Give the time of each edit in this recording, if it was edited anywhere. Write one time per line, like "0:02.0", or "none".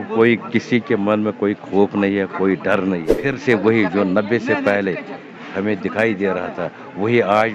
0:03.1

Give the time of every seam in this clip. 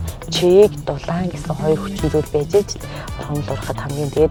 none

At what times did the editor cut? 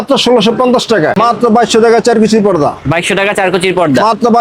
0:01.2

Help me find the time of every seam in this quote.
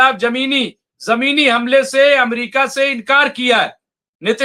none

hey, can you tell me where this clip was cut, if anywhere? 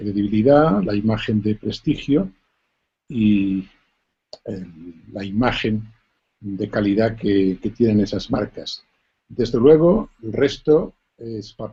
none

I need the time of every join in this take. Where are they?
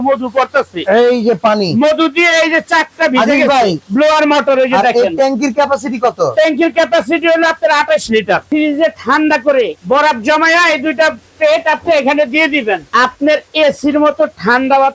0:03.8
0:08.5
0:09.8
0:12.9

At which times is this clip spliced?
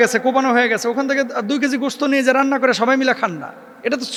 none

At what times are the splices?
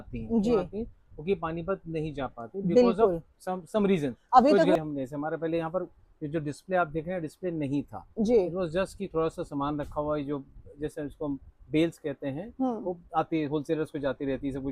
0:04.8

